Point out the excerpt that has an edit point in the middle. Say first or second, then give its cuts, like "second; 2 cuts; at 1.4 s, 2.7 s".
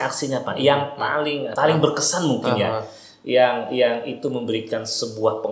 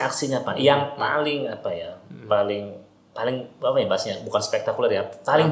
first; 1 cut; at 1.5 s